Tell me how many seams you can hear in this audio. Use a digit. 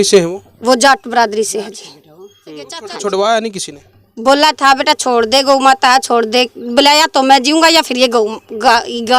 1